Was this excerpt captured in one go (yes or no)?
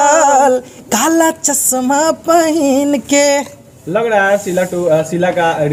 yes